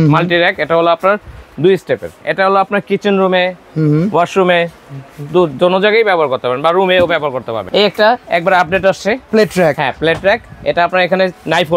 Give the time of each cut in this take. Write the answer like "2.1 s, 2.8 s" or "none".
2.2 s, 7.5 s, 9.2 s